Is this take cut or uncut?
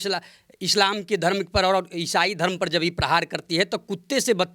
uncut